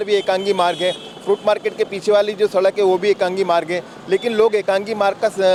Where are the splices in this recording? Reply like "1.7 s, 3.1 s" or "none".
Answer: none